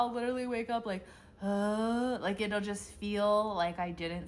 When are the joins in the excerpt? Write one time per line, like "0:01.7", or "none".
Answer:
none